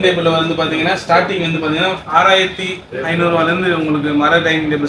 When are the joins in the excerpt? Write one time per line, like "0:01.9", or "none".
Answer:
none